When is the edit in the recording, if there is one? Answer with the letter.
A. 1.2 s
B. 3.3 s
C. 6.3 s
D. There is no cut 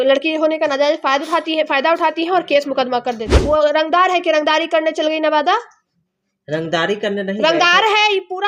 B